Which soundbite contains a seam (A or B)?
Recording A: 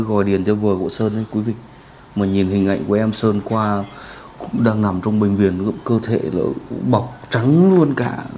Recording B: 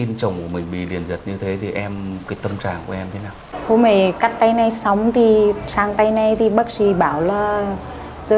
B